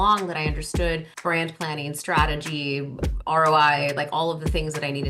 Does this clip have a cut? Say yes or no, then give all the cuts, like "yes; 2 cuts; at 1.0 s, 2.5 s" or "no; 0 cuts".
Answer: yes; 1 cut; at 1.1 s